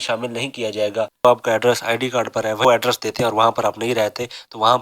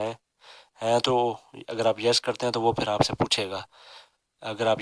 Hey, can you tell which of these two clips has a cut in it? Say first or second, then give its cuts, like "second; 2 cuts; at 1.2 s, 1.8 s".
first; 2 cuts; at 1.2 s, 2.6 s